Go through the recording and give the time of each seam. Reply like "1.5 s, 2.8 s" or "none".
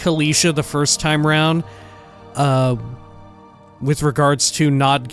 none